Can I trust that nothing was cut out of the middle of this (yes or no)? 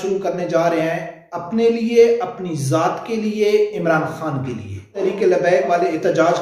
no